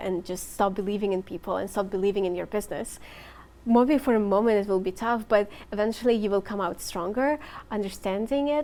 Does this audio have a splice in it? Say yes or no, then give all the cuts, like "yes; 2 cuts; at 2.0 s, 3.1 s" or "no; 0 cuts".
no; 0 cuts